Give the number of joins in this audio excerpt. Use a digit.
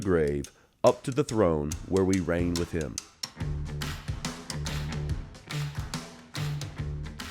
1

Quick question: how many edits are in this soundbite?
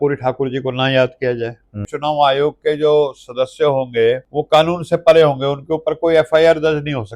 2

